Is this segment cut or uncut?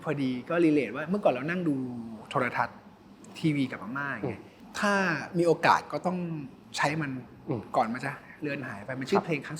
cut